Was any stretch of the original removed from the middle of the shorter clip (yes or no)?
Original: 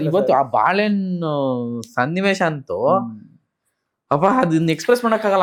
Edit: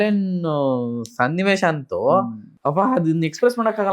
yes